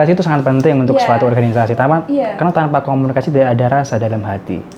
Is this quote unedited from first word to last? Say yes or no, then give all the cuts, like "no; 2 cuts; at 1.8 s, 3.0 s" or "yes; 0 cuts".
yes; 0 cuts